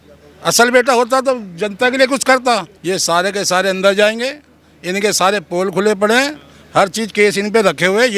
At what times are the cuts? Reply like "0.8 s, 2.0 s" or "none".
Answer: 2.7 s